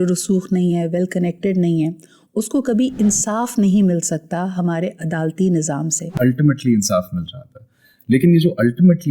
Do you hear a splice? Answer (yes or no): yes